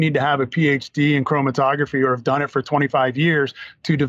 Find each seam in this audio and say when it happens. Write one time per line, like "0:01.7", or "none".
none